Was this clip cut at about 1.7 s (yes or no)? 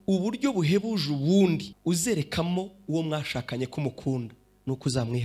yes